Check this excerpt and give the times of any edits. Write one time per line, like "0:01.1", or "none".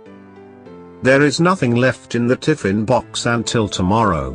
0:01.0